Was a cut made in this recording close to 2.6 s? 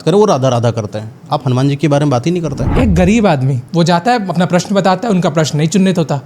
yes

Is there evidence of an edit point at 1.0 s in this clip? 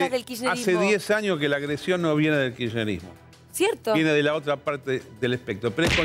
no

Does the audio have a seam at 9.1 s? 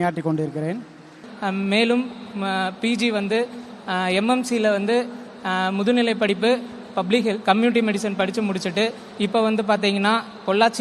no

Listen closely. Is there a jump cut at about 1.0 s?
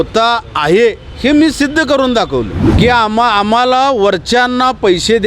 no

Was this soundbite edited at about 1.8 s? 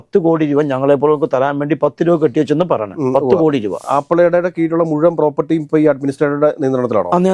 no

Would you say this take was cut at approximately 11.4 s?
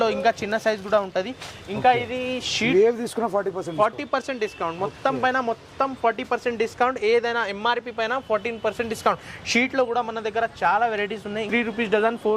yes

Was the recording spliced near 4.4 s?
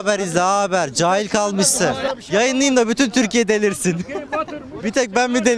no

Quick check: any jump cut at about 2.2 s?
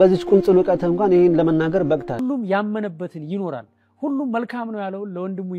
yes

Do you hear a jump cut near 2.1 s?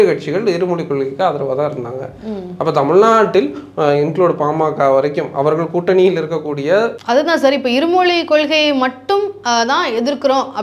no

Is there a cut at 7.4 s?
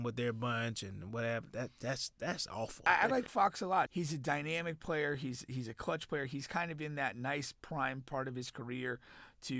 no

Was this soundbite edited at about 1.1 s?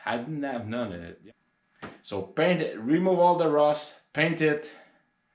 yes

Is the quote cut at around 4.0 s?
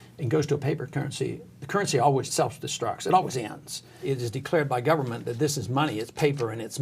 yes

